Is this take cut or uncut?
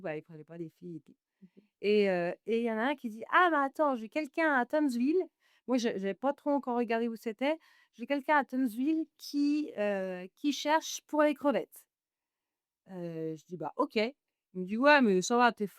uncut